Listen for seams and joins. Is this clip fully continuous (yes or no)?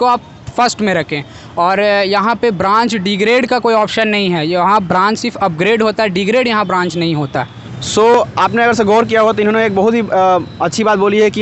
yes